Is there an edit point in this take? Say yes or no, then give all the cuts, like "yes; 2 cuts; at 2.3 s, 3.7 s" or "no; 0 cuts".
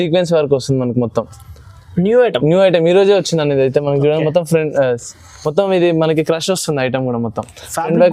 no; 0 cuts